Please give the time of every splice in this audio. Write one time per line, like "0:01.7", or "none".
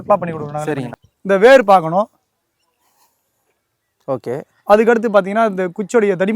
0:00.9